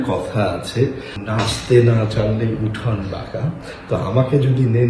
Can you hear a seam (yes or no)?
yes